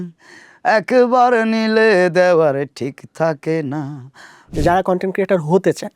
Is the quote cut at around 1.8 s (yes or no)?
no